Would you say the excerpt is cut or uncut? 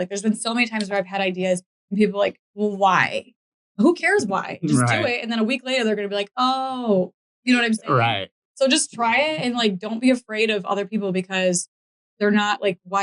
uncut